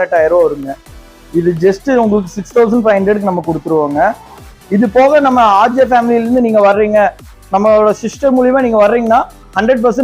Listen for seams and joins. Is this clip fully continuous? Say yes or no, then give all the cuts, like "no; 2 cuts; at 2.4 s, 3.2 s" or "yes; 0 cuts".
no; 1 cut; at 4.4 s